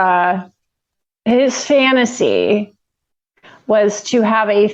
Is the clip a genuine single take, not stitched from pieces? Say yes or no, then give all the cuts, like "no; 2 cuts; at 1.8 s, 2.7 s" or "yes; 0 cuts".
yes; 0 cuts